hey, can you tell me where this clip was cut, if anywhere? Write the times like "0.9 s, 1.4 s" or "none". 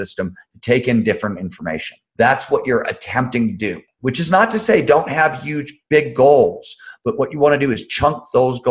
2.0 s, 3.9 s